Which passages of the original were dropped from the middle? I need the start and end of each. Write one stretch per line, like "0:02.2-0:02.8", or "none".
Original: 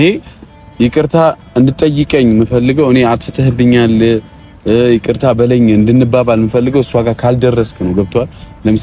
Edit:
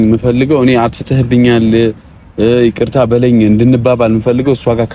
none